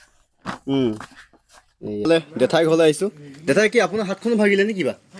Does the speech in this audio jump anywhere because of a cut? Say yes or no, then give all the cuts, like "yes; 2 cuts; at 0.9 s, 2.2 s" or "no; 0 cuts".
yes; 1 cut; at 2.1 s